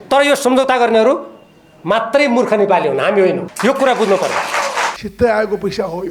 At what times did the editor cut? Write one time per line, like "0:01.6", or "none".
0:03.5
0:04.9